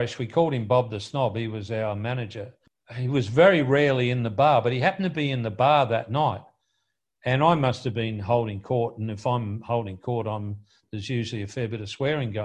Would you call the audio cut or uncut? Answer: cut